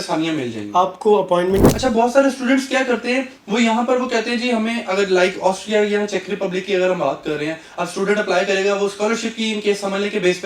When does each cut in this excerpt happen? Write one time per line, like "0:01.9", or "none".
0:01.7